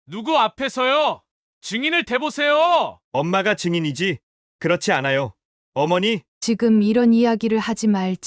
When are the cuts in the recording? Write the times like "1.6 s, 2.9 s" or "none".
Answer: 6.3 s